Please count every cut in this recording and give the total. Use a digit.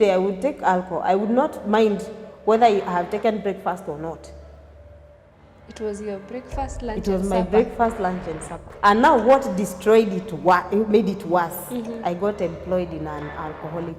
1